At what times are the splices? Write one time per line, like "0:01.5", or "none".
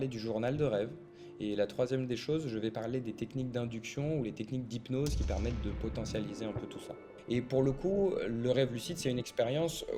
0:07.1